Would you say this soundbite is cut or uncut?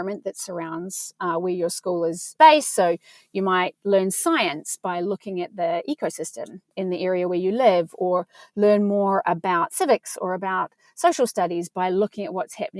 cut